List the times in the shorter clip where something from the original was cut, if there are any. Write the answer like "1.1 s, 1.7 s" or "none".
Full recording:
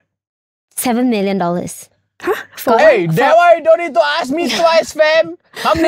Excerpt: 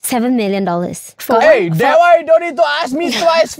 1.1 s